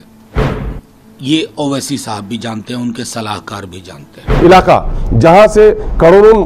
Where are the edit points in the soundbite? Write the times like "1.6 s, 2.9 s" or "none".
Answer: 4.2 s